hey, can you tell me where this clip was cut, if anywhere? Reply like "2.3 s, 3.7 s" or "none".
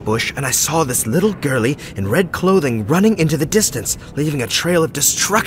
none